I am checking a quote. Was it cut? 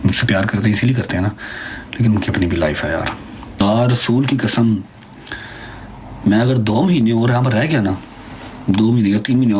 yes; 1 cut; at 3.6 s

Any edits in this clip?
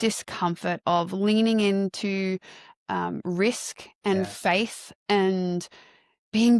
no; 0 cuts

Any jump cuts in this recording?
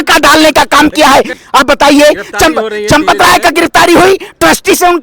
yes; 1 cut; at 1.4 s

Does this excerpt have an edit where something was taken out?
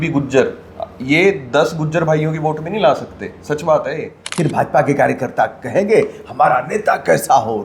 yes; 1 cut; at 4.2 s

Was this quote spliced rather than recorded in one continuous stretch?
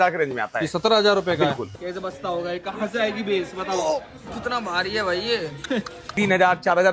yes; 2 cuts; at 1.7 s, 6.0 s

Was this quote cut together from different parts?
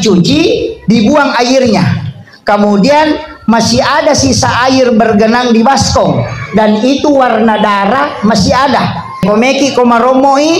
yes; 1 cut; at 9.2 s

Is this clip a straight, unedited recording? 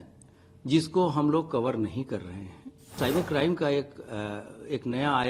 no; 1 cut; at 3.0 s

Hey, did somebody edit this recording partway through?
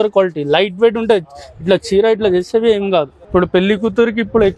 yes; 1 cut; at 3.2 s

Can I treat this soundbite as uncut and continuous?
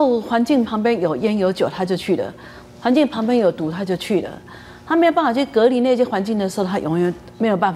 yes; 0 cuts

